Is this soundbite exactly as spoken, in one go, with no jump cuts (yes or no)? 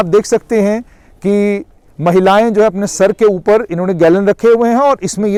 yes